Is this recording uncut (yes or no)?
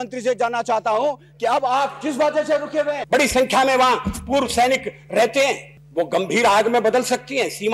no